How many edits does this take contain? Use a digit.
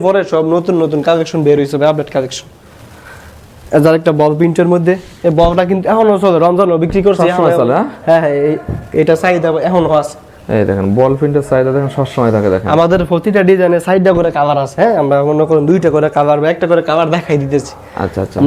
0